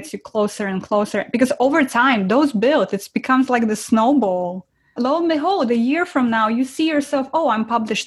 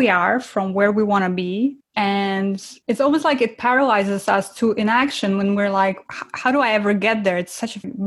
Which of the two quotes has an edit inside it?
second; 2 cuts; at 1.8 s, 2.7 s

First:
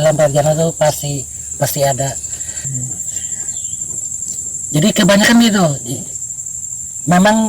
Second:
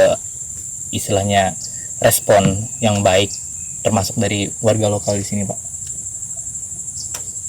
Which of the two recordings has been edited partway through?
first; 1 cut; at 2.7 s

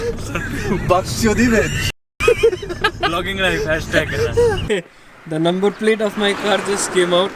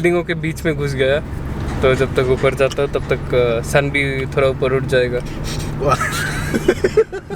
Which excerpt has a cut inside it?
first; 1 cut; at 4.5 s

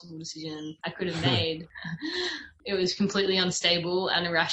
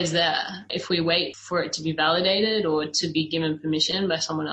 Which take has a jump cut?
second; 1 cut; at 1.4 s

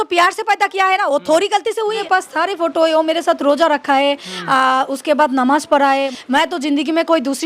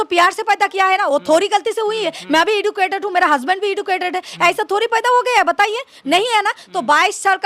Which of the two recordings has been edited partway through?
first; 2 cuts; at 2.0 s, 6.1 s

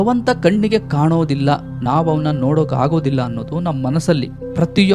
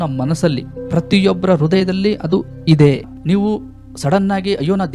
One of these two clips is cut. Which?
second; 1 cut; at 3.1 s

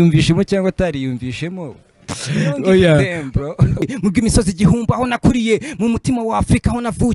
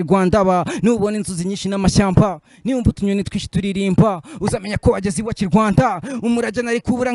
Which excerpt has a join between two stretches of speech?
first; 1 cut; at 3.9 s

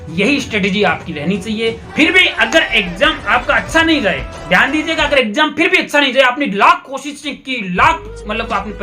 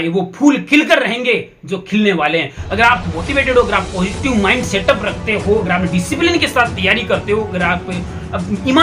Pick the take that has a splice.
first; 1 cut; at 1.8 s

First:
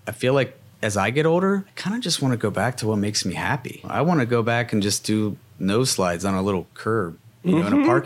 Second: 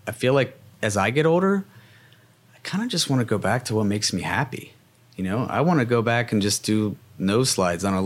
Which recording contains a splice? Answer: first; 3 cuts; at 1.7 s, 3.9 s, 6.7 s

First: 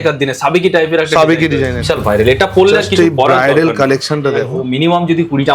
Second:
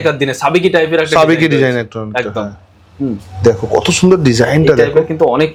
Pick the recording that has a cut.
first; 2 cuts; at 1.8 s, 4.5 s

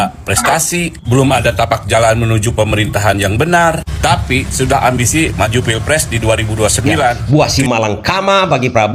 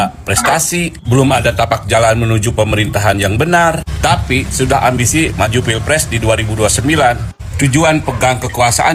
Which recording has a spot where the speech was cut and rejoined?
first; 1 cut; at 7.2 s

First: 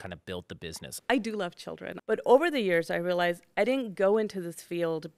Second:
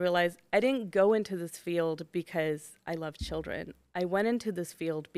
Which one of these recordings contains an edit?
first; 2 cuts; at 1.0 s, 1.9 s

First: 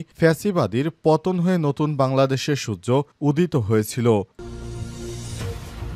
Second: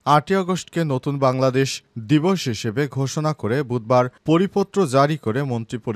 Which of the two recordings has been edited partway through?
first; 1 cut; at 4.3 s

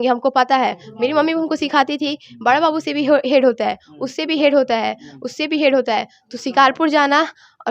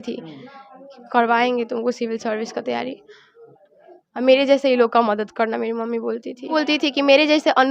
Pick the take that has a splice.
second; 1 cut; at 6.5 s

